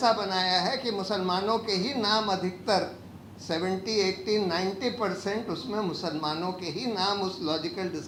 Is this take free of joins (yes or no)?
yes